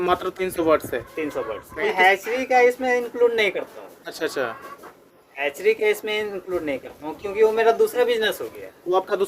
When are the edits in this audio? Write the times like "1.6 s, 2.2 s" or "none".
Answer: 1.9 s